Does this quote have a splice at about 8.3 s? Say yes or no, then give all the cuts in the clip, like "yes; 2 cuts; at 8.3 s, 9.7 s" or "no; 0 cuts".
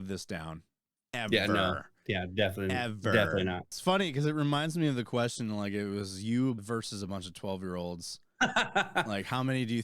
no; 2 cuts; at 3.8 s, 6.6 s